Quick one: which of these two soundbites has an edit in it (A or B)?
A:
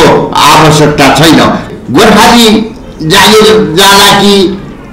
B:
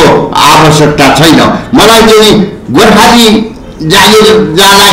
A